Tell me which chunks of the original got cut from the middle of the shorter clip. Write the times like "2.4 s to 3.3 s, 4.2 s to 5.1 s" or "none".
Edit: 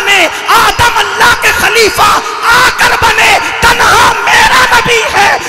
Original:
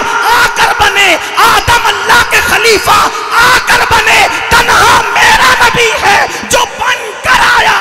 none